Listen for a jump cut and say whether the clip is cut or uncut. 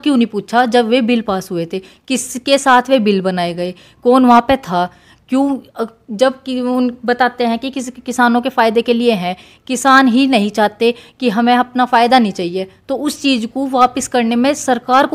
uncut